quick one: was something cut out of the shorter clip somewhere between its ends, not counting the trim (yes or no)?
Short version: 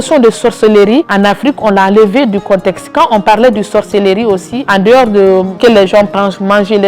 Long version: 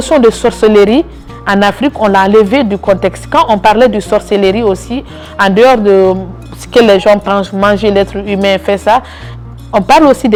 yes